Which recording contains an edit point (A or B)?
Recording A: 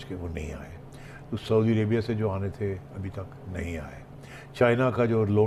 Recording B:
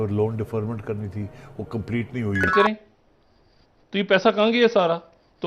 B